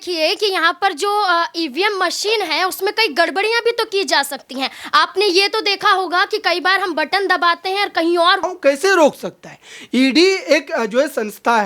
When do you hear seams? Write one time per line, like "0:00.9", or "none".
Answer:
0:08.5